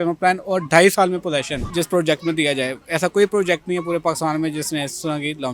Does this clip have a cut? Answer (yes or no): yes